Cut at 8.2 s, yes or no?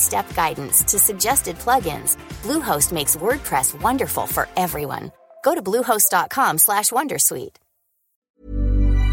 yes